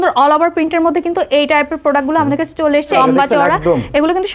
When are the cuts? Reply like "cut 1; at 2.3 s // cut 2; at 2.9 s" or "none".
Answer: cut 1; at 3.0 s